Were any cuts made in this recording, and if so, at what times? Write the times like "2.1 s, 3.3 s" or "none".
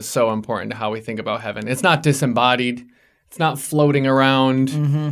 none